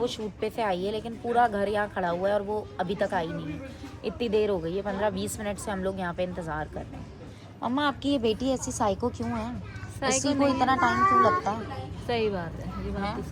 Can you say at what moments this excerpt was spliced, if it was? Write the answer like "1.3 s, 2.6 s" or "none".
none